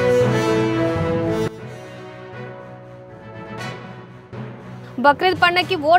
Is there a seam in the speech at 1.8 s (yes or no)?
no